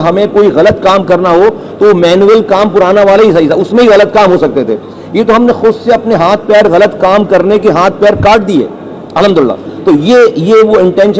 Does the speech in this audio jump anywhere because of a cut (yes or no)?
no